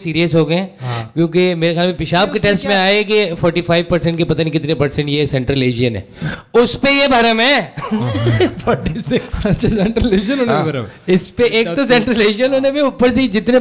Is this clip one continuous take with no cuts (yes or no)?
yes